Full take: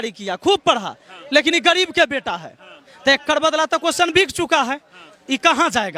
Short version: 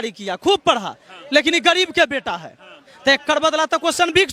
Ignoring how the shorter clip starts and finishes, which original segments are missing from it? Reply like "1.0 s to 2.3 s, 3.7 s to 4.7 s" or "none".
none